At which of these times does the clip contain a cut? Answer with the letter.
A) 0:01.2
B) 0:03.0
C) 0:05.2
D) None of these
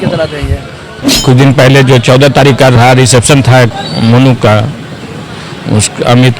A